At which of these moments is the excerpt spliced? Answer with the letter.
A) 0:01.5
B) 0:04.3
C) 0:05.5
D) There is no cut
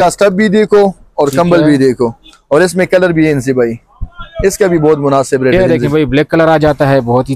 C